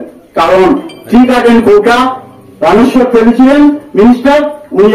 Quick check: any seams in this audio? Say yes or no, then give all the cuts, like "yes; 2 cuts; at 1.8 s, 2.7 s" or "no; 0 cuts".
no; 0 cuts